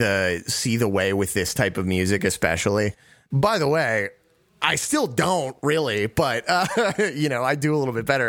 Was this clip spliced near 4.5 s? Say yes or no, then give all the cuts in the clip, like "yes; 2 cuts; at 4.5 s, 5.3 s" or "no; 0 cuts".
no; 1 cut; at 3.2 s